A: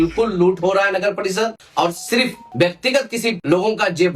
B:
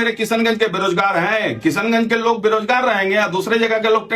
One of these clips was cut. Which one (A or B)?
A